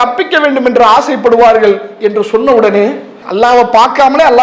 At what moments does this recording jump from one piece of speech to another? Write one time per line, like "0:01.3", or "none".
0:03.2